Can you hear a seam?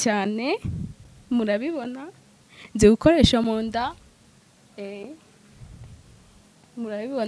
no; 0 cuts

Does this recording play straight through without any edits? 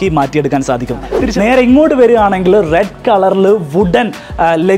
no; 1 cut; at 1.2 s

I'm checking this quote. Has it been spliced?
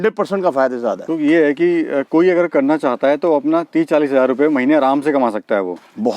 yes; 1 cut; at 1.0 s

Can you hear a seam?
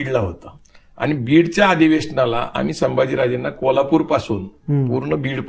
no; 0 cuts

